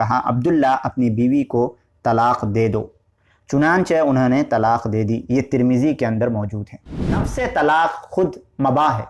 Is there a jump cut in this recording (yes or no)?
yes